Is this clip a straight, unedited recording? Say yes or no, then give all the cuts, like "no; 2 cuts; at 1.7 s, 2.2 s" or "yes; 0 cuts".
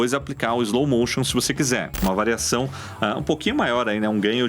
no; 1 cut; at 2.0 s